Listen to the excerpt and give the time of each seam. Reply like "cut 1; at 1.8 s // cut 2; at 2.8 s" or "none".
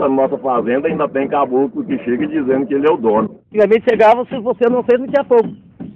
cut 1; at 3.4 s